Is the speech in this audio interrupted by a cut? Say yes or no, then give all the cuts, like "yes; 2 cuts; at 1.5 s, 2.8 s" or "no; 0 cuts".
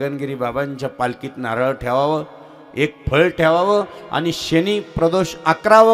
no; 0 cuts